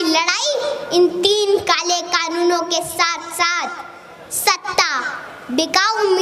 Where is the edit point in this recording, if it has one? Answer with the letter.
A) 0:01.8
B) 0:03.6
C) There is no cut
C